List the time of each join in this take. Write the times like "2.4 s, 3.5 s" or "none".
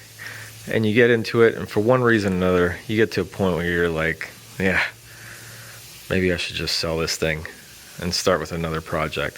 none